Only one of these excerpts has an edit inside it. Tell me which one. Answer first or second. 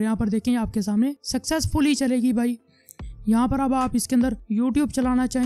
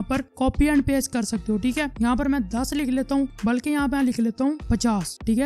second